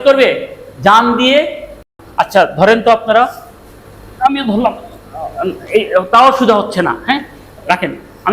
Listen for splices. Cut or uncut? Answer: cut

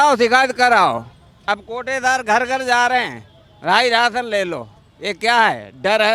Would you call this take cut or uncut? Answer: uncut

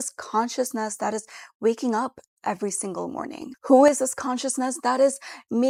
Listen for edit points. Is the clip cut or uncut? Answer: uncut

